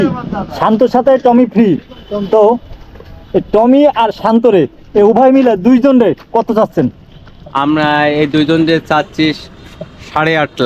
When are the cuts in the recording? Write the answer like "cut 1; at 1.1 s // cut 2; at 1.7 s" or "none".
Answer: none